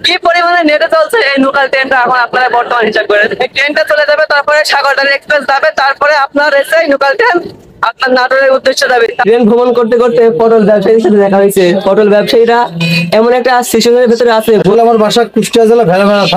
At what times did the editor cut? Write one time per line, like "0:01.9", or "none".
0:03.5